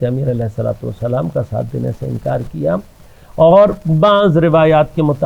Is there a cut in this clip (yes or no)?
no